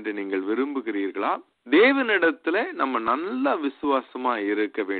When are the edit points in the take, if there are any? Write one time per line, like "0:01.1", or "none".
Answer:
0:01.5